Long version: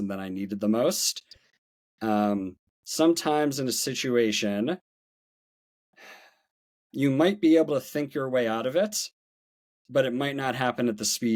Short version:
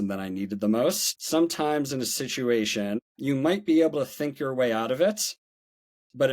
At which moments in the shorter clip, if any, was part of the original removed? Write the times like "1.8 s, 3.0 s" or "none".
1.1 s, 3.0 s